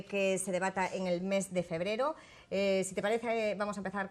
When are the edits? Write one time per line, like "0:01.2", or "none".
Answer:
none